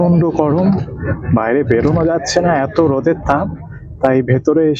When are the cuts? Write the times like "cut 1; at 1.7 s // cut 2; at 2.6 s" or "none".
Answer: none

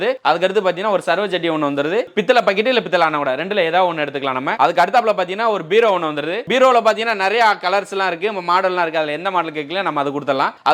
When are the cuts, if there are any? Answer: none

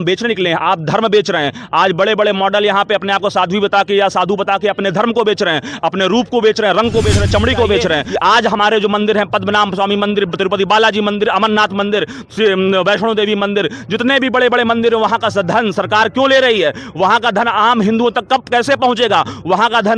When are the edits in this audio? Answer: cut 1; at 8.1 s

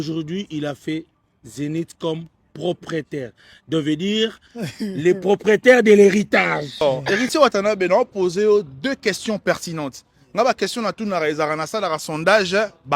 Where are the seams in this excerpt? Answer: cut 1; at 6.8 s

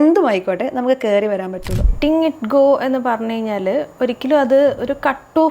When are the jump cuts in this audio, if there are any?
cut 1; at 1.9 s

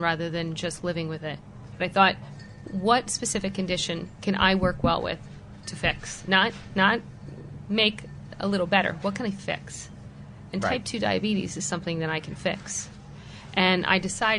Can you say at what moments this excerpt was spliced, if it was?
cut 1; at 1.7 s // cut 2; at 2.7 s

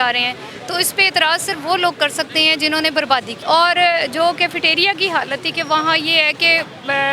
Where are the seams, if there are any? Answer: cut 1; at 3.3 s

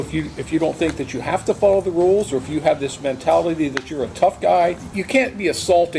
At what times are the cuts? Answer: cut 1; at 4.9 s

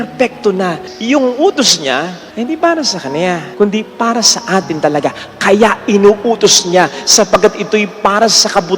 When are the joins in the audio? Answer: cut 1; at 0.9 s // cut 2; at 2.2 s // cut 3; at 3.5 s

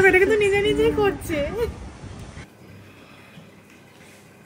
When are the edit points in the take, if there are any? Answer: cut 1; at 2.4 s

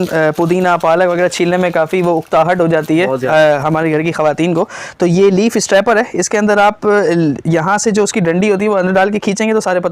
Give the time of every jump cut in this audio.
none

